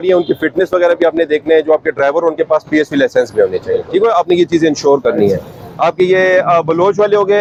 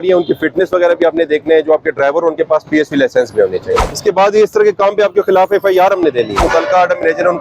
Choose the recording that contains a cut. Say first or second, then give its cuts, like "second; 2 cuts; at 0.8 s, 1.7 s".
second; 2 cuts; at 3.9 s, 6.4 s